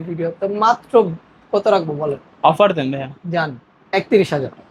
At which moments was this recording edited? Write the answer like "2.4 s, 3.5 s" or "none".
none